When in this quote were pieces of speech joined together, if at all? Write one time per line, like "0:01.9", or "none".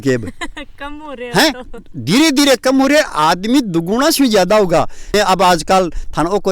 0:05.1